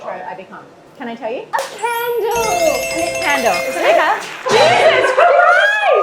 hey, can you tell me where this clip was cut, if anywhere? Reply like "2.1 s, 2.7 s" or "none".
1.5 s